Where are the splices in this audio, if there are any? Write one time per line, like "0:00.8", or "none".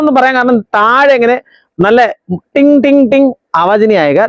none